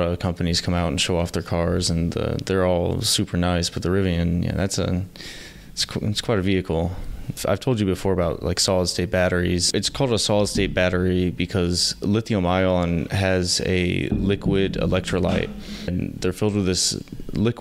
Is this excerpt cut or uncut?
cut